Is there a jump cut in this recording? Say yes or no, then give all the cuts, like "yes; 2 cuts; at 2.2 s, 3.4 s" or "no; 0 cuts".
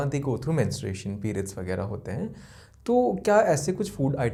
no; 0 cuts